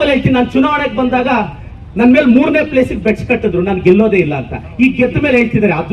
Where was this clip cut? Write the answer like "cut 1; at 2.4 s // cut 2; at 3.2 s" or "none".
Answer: none